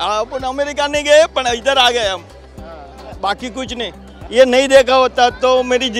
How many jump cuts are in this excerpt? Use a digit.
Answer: 1